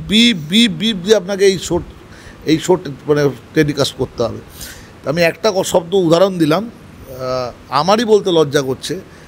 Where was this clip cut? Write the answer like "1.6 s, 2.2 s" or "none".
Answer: none